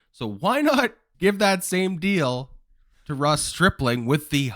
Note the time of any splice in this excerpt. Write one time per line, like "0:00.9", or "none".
0:01.0

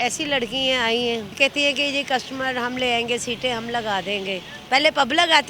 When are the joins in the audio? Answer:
0:01.4
0:04.5

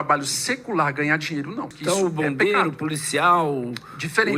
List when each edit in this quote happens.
0:01.7

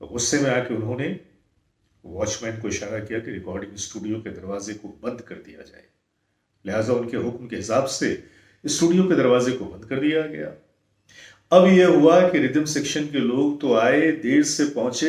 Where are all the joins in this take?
none

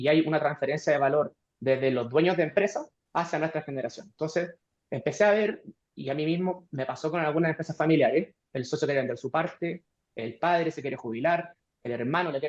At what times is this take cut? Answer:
0:02.9
0:08.5

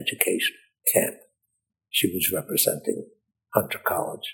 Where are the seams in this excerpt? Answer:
none

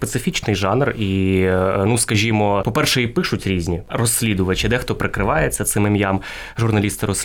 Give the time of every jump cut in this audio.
none

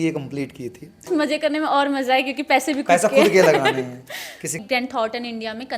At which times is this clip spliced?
0:01.1
0:04.5

